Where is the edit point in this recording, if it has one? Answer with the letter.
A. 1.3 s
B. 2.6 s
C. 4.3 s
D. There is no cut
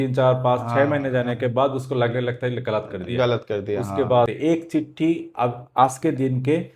C